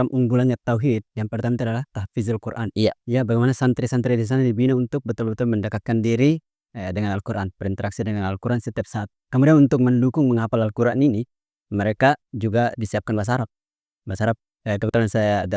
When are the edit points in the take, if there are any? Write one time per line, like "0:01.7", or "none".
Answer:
none